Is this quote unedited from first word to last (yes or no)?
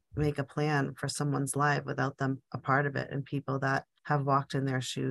yes